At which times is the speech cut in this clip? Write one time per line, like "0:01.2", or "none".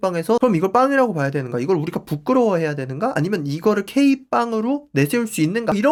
none